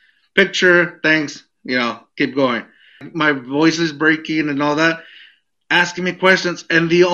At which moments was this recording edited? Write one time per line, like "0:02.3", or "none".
0:03.1

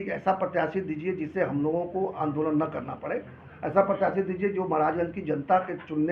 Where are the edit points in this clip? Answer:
none

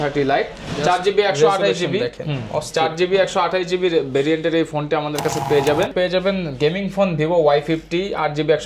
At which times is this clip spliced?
0:05.9

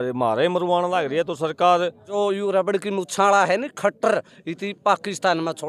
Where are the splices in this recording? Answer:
0:02.1

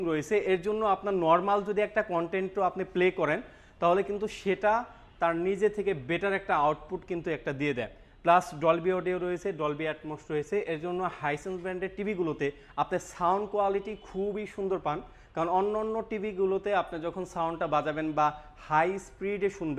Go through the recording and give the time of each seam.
none

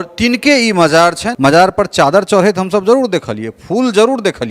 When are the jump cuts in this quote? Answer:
0:01.3

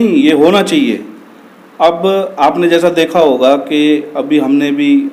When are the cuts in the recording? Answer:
none

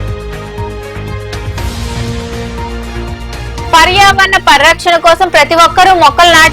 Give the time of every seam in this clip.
0:01.4

